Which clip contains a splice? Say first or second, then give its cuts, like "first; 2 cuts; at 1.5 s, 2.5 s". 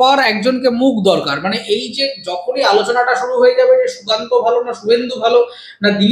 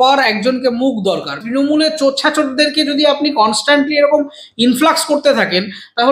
second; 1 cut; at 1.4 s